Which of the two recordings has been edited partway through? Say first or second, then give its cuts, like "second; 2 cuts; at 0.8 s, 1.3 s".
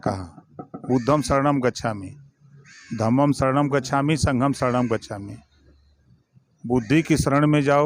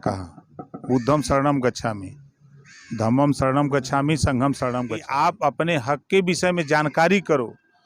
second; 1 cut; at 5.0 s